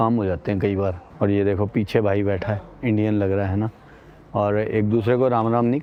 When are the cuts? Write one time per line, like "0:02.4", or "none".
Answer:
none